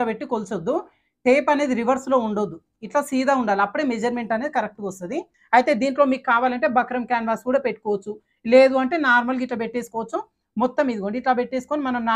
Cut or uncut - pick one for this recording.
cut